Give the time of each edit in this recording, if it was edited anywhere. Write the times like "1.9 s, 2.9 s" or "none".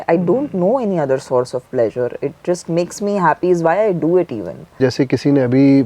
4.8 s